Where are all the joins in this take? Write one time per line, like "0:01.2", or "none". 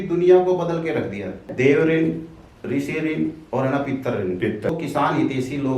0:01.5
0:04.7